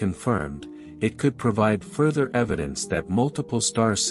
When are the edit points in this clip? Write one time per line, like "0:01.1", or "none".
none